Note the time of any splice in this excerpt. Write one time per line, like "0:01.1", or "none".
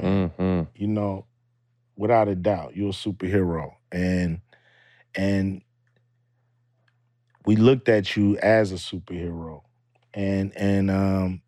none